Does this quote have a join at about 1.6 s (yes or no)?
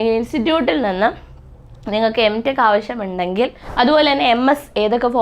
no